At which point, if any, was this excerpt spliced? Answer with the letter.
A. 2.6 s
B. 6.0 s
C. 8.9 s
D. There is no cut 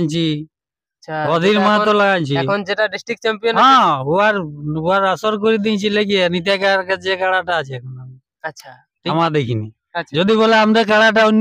C